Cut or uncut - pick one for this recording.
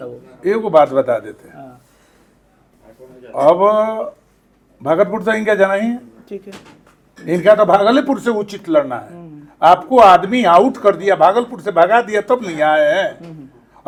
uncut